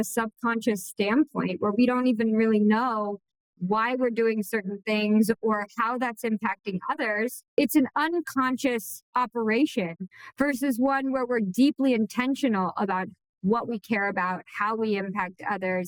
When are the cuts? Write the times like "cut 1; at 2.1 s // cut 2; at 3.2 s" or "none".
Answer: none